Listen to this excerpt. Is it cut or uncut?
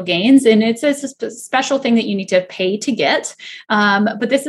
uncut